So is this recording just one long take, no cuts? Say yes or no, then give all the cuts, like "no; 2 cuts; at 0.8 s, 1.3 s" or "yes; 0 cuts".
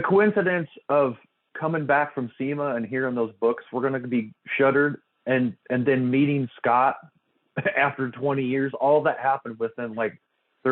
yes; 0 cuts